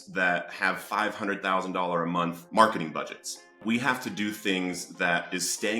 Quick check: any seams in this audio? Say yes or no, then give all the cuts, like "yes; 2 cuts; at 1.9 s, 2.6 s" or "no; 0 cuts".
yes; 2 cuts; at 2.4 s, 3.6 s